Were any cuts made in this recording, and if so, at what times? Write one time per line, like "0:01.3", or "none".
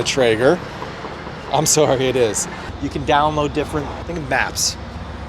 0:02.6
0:04.0